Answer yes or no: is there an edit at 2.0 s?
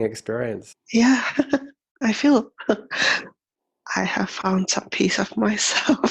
yes